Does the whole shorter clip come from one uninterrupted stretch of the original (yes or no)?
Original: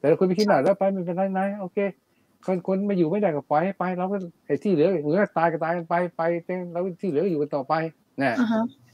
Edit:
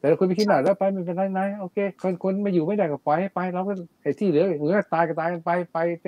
no